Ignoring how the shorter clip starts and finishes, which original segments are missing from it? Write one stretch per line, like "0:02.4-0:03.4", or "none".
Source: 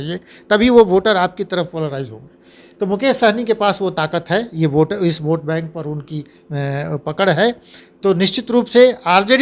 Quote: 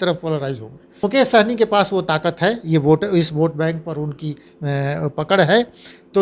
0:02.5-0:02.9